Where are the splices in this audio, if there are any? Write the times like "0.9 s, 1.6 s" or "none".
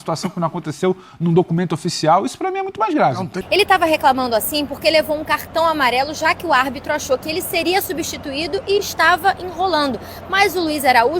3.3 s